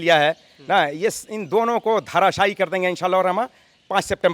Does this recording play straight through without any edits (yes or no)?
yes